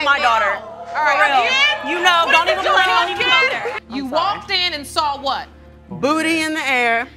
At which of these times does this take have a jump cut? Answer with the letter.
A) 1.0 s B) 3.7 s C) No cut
B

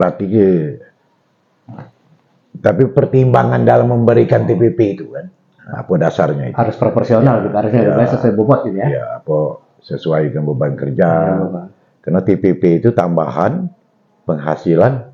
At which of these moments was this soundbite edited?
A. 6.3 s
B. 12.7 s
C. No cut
C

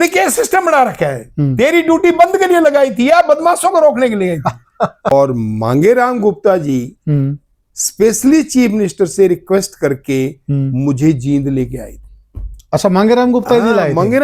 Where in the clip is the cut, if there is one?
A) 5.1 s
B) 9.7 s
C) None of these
A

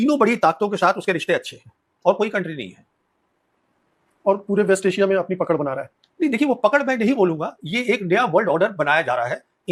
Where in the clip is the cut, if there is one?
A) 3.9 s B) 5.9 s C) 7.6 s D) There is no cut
D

